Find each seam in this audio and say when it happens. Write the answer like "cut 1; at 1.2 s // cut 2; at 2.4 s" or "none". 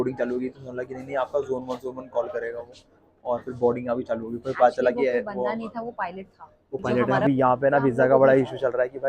cut 1; at 7.3 s